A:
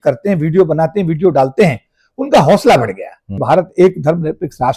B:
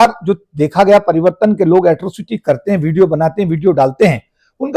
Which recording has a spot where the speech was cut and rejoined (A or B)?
A